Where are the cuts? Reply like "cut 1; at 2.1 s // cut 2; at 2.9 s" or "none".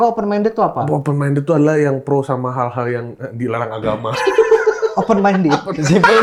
none